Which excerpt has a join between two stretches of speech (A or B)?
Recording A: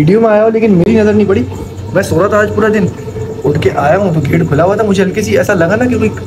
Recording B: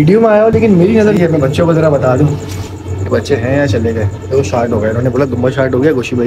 B